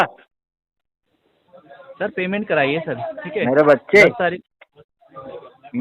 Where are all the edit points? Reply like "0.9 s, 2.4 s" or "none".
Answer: none